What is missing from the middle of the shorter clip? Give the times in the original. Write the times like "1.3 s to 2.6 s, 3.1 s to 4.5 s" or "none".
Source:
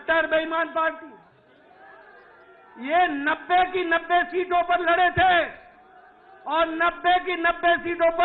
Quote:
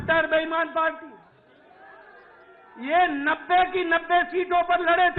none